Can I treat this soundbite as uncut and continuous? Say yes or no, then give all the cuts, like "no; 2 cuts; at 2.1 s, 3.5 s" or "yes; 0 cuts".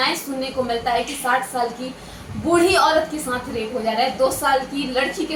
yes; 0 cuts